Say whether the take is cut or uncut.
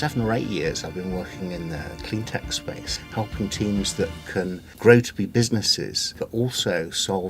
cut